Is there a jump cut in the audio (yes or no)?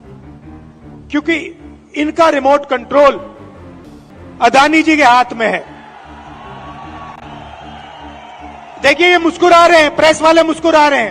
yes